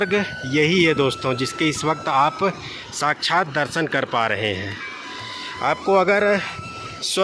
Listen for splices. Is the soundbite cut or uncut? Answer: uncut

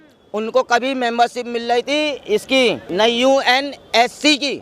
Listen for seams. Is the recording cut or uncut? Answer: uncut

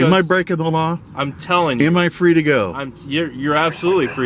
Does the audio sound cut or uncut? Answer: uncut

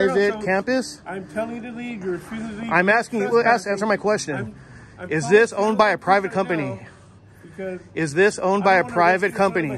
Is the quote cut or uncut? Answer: uncut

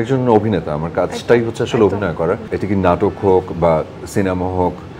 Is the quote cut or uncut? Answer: cut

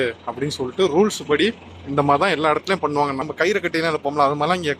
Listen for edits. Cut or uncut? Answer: cut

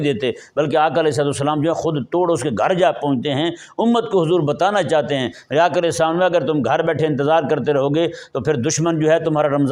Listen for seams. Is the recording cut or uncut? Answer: uncut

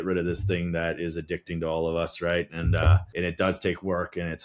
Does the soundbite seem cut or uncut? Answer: cut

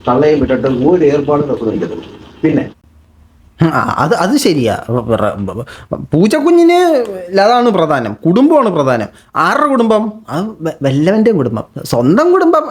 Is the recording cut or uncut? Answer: uncut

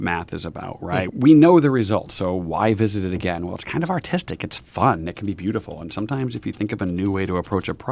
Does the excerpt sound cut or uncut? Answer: cut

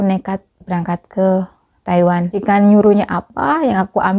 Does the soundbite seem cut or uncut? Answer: cut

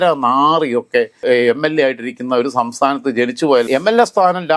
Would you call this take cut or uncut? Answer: cut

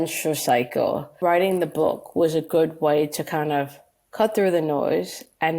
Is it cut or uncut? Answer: cut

